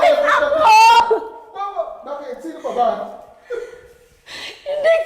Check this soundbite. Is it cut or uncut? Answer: cut